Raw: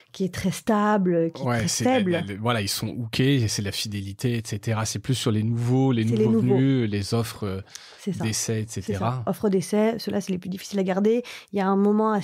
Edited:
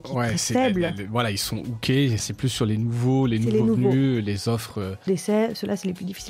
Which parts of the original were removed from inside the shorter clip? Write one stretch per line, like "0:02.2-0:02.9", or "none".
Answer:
0:03.6-0:04.9
0:07.7-0:09.5